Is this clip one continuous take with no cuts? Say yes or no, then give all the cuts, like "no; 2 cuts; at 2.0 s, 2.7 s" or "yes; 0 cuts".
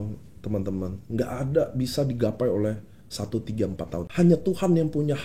no; 1 cut; at 4.1 s